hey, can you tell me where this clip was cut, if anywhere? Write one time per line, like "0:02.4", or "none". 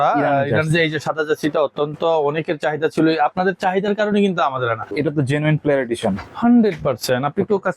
0:04.9